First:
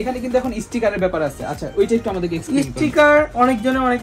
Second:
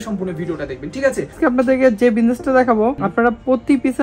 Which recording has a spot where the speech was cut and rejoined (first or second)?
second